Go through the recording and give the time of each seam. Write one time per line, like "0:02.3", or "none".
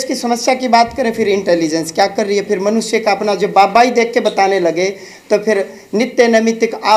none